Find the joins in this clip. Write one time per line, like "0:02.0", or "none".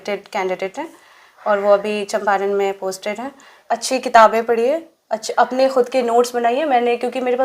0:03.6